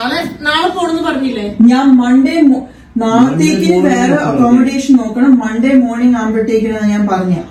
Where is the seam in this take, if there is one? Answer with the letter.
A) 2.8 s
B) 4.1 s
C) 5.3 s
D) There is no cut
D